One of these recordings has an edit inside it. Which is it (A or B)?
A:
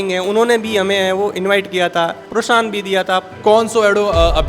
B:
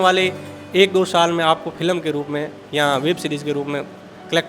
A